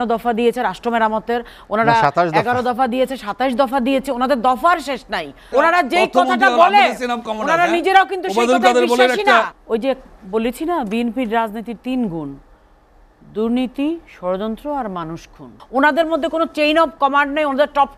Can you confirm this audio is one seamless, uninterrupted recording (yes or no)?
no